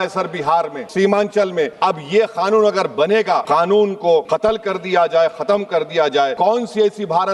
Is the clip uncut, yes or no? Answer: no